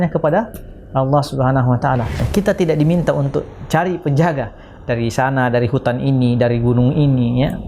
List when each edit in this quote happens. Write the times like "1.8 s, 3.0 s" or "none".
2.2 s